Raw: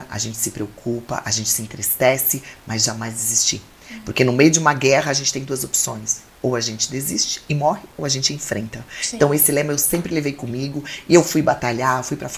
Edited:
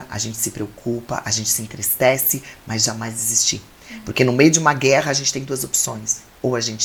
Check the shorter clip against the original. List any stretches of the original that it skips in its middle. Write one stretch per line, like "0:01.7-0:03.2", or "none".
none